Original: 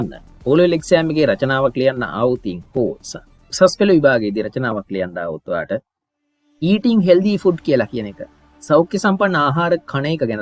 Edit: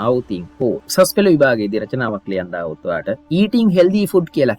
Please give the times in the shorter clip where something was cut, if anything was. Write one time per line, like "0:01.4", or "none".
0:00.8
0:03.2